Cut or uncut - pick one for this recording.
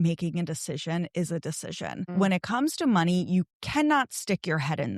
cut